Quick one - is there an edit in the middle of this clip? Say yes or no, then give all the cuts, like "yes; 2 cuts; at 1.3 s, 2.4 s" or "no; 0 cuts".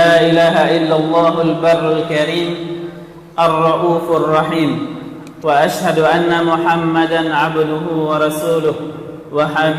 no; 0 cuts